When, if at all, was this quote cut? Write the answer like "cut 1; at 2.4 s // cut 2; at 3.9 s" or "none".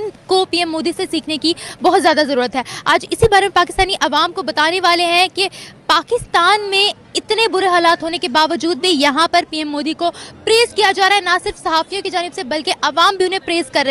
none